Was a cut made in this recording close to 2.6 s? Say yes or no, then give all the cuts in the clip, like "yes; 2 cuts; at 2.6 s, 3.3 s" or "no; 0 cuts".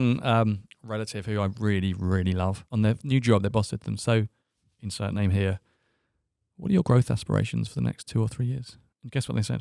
yes; 1 cut; at 2.6 s